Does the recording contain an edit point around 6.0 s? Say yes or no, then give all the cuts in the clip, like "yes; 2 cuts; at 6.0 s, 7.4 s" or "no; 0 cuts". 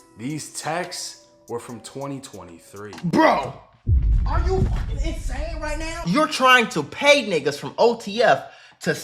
yes; 1 cut; at 6.0 s